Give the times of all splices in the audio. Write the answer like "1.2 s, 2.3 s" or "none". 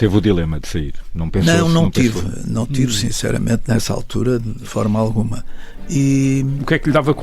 4.6 s